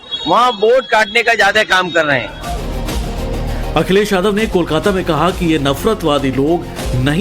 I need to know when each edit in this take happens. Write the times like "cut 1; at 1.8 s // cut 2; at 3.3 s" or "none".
cut 1; at 6.0 s